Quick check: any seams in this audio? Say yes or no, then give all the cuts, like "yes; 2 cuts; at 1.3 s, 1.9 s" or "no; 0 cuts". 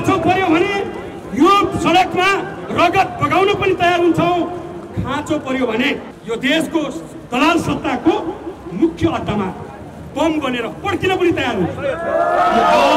yes; 1 cut; at 6.1 s